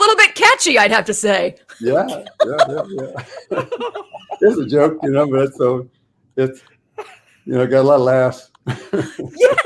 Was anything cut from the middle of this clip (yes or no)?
no